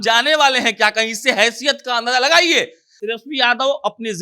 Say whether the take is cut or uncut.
cut